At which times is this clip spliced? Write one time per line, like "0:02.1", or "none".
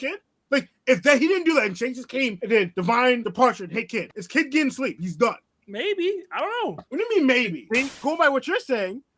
0:07.9